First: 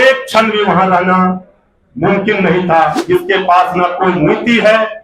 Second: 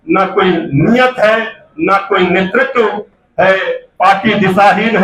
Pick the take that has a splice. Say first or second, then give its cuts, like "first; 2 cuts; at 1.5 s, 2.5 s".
first; 1 cut; at 3.0 s